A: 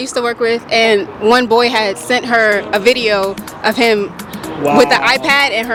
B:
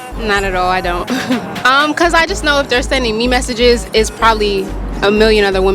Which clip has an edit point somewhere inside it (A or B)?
B